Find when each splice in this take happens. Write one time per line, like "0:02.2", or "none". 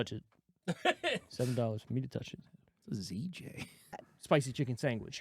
0:04.1